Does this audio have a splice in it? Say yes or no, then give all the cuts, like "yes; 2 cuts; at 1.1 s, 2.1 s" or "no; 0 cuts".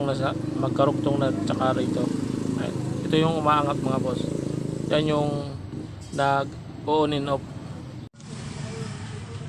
yes; 1 cut; at 8.1 s